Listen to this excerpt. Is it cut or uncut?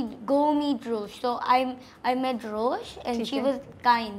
uncut